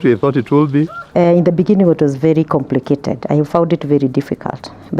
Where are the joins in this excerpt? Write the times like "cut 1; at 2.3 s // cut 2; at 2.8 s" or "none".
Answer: cut 1; at 1.0 s